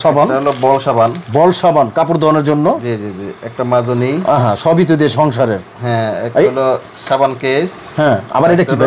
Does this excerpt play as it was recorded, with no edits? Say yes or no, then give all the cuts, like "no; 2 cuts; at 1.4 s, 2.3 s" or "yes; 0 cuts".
yes; 0 cuts